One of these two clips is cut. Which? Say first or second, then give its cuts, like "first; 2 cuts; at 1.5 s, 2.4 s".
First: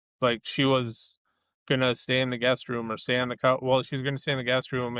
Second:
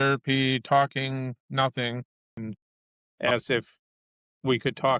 second; 1 cut; at 2.4 s